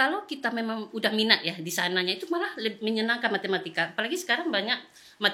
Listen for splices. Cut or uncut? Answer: uncut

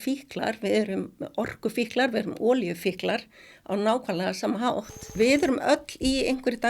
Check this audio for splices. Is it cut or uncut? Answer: cut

